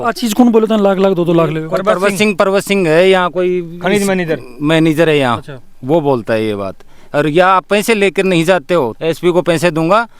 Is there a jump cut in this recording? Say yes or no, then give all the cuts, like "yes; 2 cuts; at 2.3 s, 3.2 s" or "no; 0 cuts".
yes; 1 cut; at 8.9 s